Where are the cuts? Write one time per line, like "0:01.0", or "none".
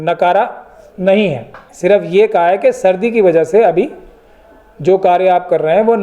0:01.7